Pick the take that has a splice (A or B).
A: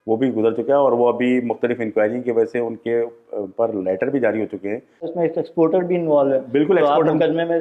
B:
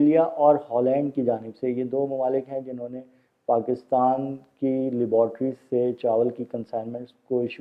A